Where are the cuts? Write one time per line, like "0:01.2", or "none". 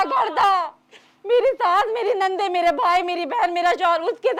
none